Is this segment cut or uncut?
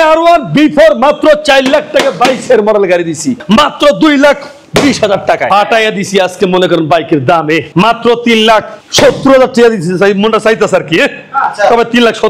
cut